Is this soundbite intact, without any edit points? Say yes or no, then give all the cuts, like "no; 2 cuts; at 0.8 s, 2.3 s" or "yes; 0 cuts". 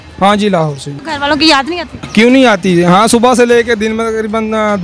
no; 2 cuts; at 0.9 s, 1.9 s